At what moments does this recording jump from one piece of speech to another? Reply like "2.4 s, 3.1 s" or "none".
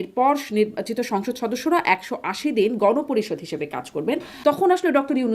4.3 s